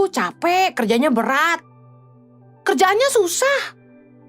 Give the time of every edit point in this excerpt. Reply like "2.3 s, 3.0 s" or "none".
none

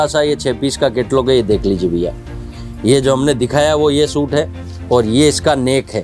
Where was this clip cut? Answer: none

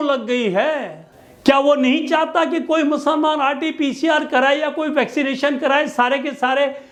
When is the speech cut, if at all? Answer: none

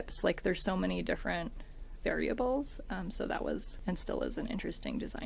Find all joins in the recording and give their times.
3.7 s

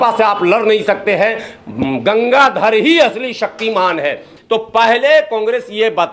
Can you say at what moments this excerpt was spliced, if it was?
4.3 s

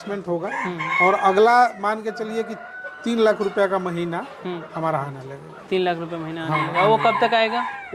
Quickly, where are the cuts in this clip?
none

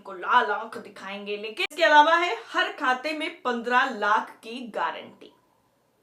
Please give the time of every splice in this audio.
1.7 s

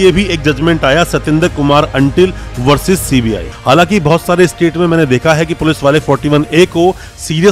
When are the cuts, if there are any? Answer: 3.5 s

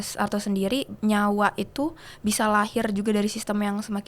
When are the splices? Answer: 0.9 s

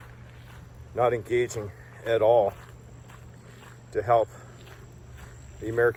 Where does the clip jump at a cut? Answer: none

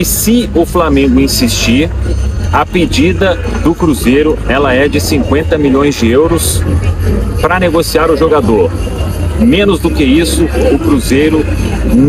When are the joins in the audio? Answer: none

